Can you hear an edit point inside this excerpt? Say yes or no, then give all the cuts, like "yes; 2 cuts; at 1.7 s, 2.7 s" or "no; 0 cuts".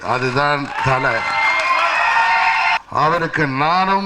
yes; 1 cut; at 2.8 s